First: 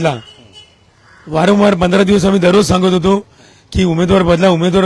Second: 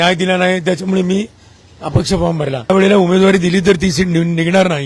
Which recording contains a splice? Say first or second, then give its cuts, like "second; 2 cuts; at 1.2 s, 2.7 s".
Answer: second; 1 cut; at 2.7 s